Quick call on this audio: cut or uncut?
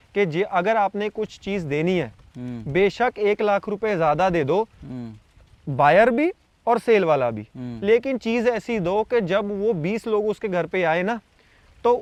uncut